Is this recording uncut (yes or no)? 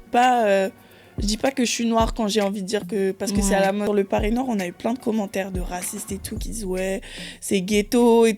no